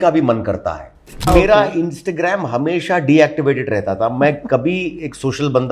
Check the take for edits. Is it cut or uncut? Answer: cut